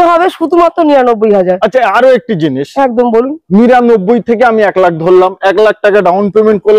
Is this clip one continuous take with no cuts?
yes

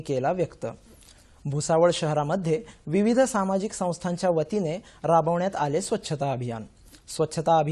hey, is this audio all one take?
yes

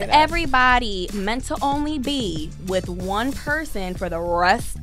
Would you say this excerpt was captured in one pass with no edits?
yes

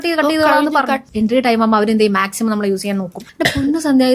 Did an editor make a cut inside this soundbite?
yes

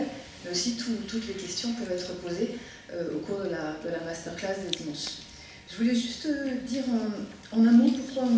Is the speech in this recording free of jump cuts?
no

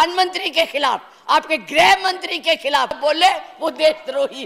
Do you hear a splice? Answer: yes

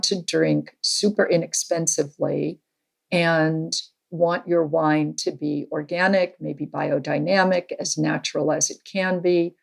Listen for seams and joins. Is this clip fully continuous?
yes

